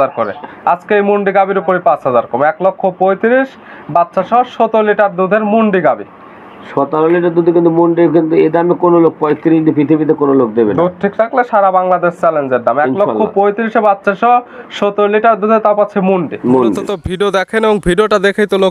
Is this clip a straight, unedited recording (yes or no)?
no